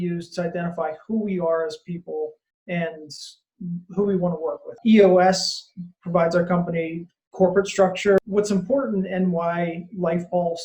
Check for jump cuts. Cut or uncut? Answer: cut